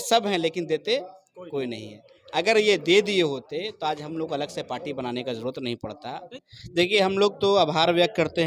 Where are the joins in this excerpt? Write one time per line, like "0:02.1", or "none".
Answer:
0:06.3